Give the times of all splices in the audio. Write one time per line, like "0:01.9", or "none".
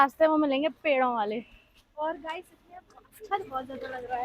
none